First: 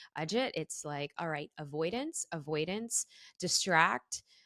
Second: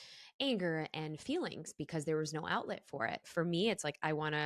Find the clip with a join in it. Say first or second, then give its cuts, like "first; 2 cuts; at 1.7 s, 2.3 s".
second; 1 cut; at 3.3 s